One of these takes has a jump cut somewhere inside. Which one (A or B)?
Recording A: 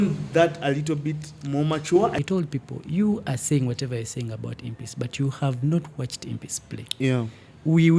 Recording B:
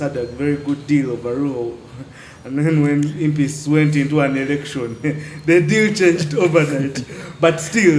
A